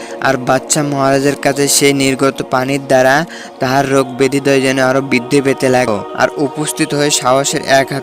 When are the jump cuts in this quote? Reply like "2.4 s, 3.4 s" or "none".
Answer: 5.9 s

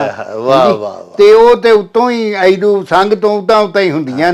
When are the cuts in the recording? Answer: none

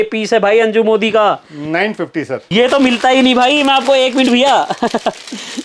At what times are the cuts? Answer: 2.4 s

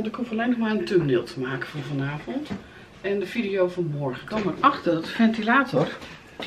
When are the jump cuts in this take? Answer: 4.2 s

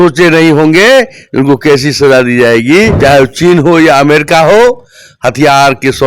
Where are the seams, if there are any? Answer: 2.9 s

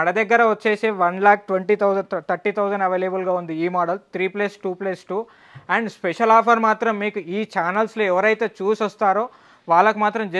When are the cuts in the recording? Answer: none

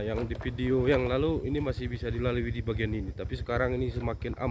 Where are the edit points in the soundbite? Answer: none

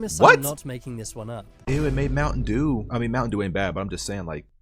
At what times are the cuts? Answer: 1.6 s

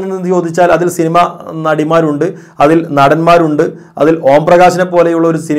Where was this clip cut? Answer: none

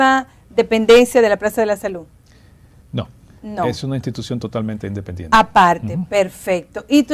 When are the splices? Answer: 1.5 s

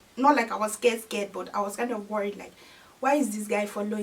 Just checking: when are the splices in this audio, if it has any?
none

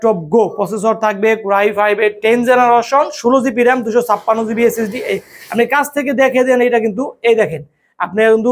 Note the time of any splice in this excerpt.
none

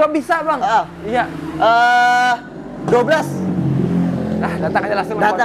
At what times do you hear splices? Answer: none

